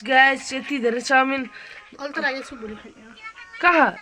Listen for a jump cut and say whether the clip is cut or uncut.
uncut